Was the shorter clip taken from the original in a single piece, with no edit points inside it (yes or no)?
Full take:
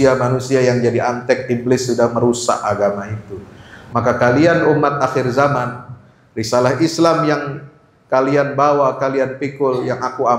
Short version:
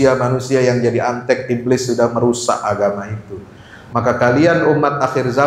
yes